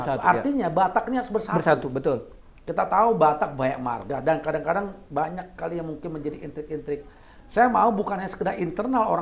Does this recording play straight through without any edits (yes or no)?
yes